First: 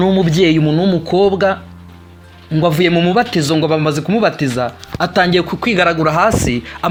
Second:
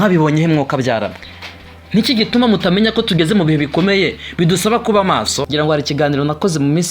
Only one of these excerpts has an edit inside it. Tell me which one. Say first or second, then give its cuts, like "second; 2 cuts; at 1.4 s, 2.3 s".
second; 1 cut; at 5.5 s